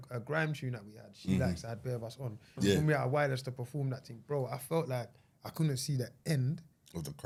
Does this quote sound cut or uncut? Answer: uncut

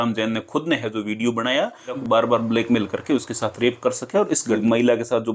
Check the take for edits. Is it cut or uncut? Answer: cut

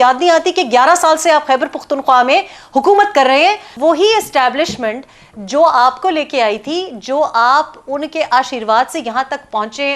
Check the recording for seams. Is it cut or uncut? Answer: cut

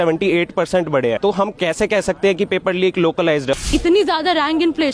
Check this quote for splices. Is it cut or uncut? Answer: cut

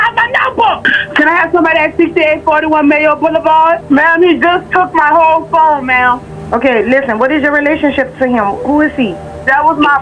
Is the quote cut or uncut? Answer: cut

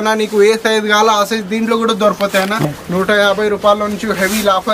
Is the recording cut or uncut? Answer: cut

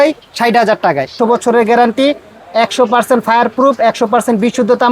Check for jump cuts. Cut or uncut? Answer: cut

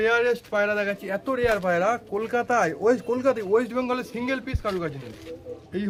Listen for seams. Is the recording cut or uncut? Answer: uncut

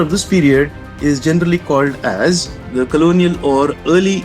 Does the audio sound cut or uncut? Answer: cut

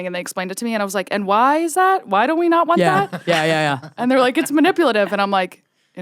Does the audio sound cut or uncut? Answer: uncut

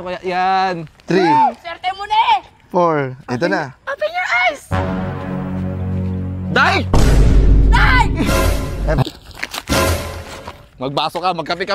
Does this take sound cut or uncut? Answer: cut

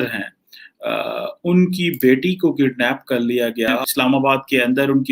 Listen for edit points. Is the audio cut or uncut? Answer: cut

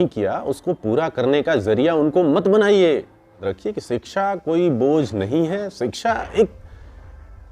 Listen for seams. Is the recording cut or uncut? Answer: cut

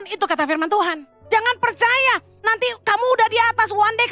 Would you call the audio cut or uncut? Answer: cut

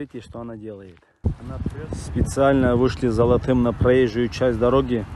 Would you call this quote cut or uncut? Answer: cut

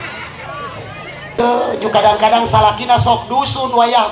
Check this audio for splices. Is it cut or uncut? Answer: cut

